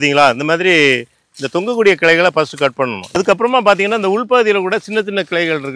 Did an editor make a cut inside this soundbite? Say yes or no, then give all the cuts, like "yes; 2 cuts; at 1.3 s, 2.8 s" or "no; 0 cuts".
yes; 1 cut; at 3.0 s